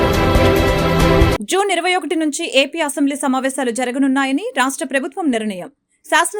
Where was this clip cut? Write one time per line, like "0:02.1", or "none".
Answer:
0:01.3